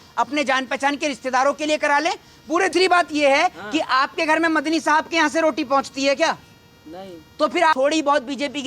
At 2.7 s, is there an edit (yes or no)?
yes